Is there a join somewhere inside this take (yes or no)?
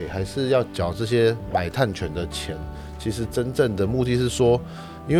no